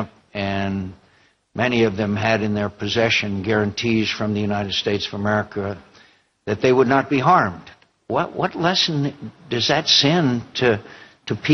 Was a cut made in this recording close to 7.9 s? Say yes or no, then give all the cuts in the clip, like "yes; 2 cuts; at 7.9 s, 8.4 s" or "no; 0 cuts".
yes; 1 cut; at 7.9 s